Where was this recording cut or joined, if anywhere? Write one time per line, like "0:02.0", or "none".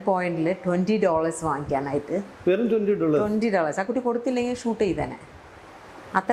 none